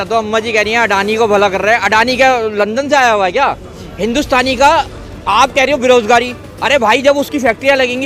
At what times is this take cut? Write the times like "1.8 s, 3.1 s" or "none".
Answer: none